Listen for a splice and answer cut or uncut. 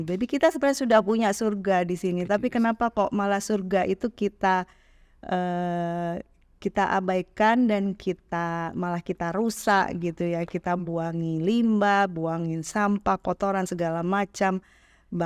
uncut